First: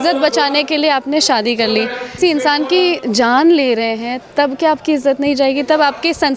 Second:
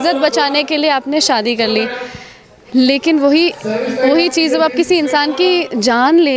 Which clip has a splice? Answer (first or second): first